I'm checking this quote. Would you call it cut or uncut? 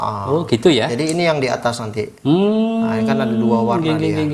uncut